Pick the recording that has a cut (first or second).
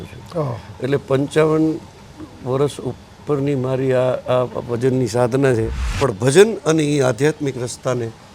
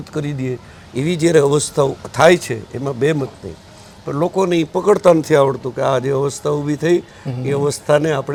first